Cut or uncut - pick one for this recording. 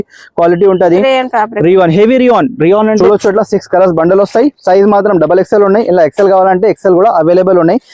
cut